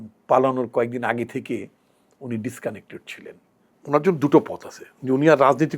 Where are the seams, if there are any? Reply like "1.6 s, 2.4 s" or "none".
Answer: 3.7 s